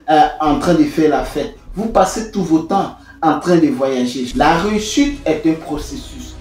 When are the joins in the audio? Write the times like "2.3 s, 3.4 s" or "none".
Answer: 4.2 s